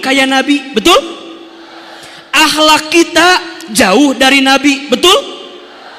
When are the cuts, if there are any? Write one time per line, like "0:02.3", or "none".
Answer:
none